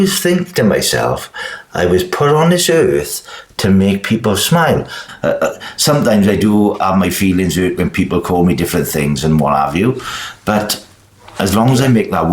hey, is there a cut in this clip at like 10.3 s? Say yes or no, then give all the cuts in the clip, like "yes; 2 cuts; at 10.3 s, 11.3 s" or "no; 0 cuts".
no; 1 cut; at 5.1 s